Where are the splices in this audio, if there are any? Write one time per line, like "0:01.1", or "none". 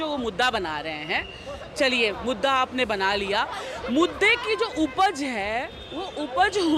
none